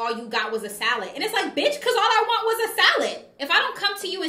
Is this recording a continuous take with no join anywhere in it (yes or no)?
no